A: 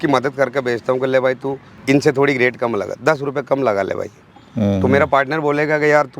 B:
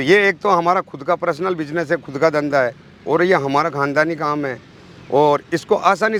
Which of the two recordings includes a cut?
A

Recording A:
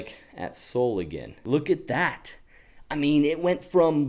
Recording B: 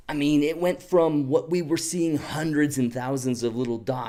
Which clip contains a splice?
A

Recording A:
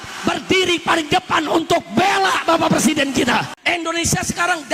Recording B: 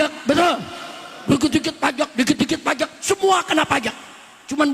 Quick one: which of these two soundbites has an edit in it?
A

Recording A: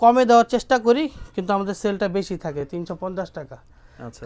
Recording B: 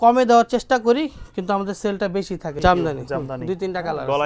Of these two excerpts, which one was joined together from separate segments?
B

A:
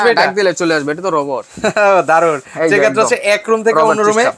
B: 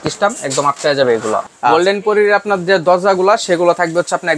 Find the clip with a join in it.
B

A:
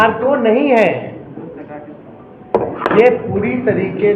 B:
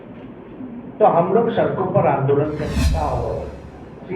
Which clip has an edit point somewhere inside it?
B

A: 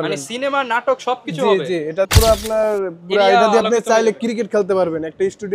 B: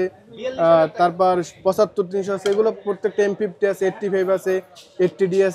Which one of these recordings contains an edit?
A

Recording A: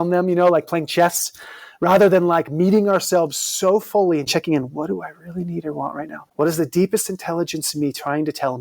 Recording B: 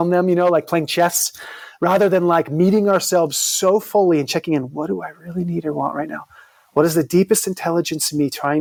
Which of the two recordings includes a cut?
A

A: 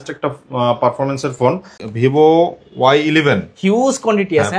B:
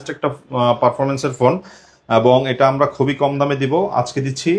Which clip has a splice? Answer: A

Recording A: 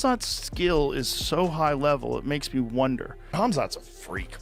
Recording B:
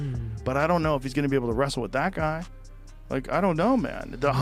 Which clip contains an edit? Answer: A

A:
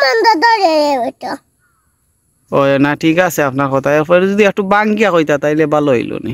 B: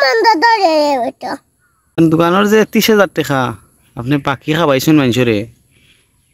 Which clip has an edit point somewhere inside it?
B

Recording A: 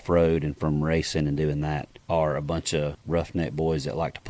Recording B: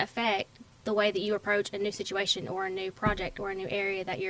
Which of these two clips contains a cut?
A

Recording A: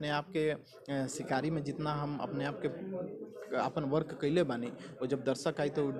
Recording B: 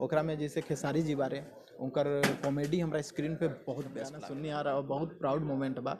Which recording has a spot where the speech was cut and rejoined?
B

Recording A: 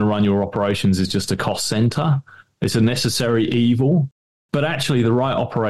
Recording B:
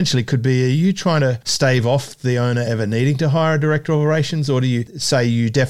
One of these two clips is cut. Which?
B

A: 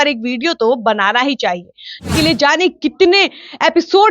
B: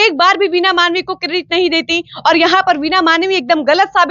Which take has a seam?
A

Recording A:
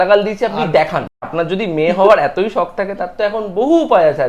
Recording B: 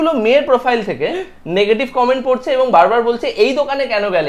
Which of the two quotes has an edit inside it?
A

